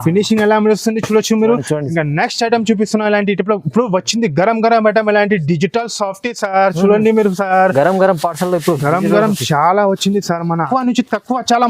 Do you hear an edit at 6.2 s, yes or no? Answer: no